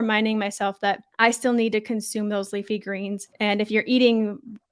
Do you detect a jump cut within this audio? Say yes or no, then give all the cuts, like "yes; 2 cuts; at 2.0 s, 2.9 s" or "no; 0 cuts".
yes; 2 cuts; at 1.1 s, 3.3 s